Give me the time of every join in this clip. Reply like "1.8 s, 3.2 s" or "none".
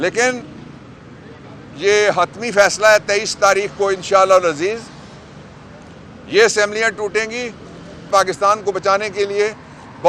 8.1 s